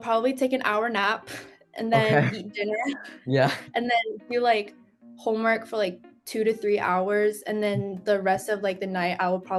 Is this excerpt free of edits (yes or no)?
yes